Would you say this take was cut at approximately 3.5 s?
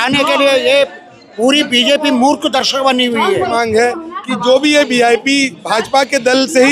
yes; 1 cut; at 3.5 s

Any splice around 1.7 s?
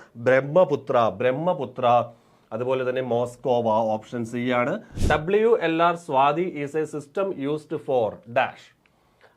no; 1 cut; at 4.9 s

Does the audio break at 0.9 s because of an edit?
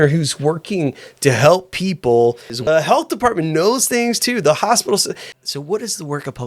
no; 2 cuts; at 2.7 s, 5.3 s

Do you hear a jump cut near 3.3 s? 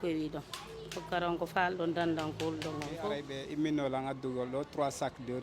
yes; 1 cut; at 3.3 s

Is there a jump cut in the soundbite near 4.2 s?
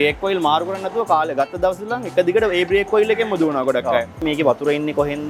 yes; 1 cut; at 4.2 s

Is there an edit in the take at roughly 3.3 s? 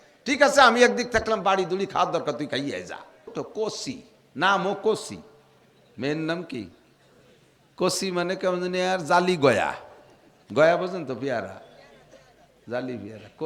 yes; 1 cut; at 3.3 s

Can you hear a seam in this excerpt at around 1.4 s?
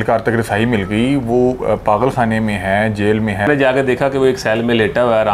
no; 1 cut; at 3.5 s

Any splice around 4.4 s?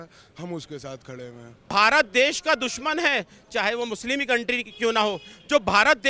no; 1 cut; at 1.7 s

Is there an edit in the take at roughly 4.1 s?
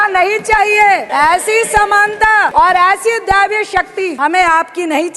yes; 3 cuts; at 1.1 s, 2.5 s, 4.1 s

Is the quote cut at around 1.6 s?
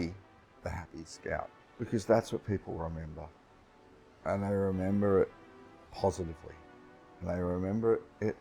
yes; 1 cut; at 1.6 s

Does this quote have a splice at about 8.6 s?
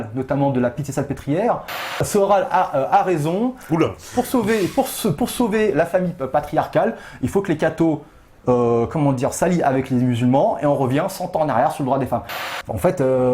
no; 2 cuts; at 2.0 s, 12.5 s

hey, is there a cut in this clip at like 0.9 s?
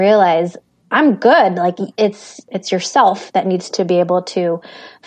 no; 1 cut; at 2.5 s

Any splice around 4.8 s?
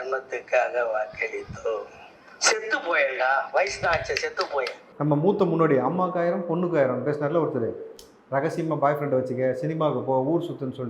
yes; 1 cut; at 4.8 s

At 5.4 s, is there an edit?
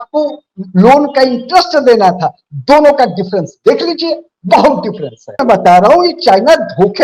yes; 1 cut; at 5.4 s

